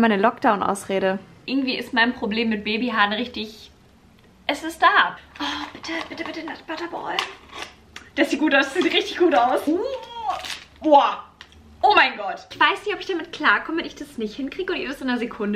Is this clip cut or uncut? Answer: cut